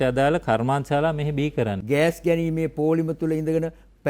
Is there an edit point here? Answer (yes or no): yes